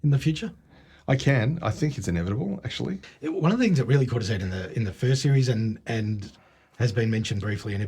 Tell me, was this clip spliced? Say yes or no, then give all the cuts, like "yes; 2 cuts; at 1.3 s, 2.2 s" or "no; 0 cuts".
yes; 1 cut; at 3.1 s